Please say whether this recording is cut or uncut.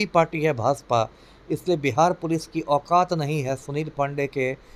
uncut